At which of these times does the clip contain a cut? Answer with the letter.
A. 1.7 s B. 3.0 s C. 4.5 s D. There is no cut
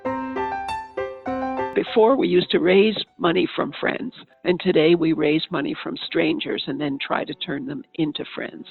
A